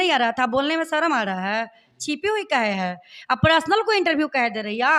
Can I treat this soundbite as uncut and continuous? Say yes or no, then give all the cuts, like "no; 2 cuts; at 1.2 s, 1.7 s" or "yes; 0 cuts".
yes; 0 cuts